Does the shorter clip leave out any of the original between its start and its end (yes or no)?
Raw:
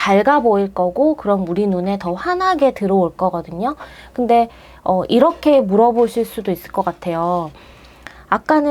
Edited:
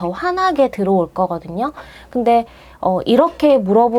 no